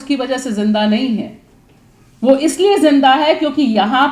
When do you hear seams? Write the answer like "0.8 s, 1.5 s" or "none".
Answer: none